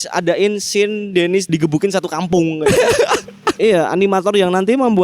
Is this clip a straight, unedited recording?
no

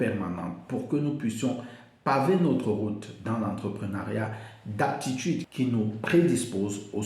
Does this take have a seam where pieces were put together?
yes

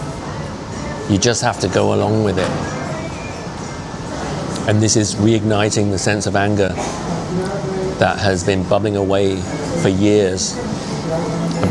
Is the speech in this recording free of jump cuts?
yes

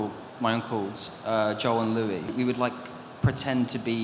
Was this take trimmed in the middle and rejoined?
yes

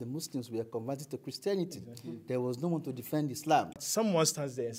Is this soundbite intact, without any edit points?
no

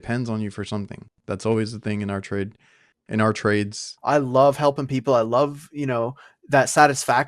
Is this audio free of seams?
no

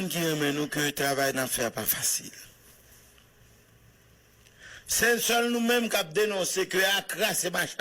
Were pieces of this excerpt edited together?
yes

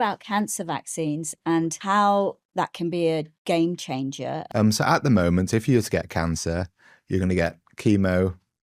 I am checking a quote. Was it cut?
yes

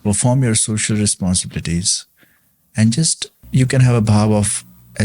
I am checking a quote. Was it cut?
yes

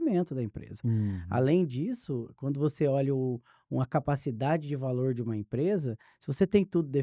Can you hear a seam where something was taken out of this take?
no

